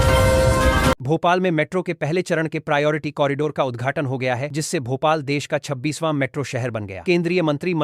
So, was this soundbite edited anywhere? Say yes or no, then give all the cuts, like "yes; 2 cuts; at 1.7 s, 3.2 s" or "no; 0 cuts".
yes; 1 cut; at 1.0 s